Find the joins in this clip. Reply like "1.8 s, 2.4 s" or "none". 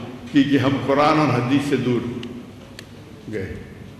none